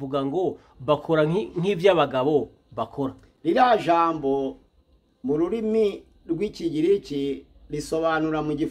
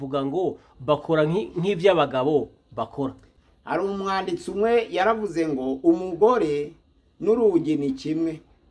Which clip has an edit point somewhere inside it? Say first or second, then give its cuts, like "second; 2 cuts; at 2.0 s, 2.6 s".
second; 1 cut; at 3.2 s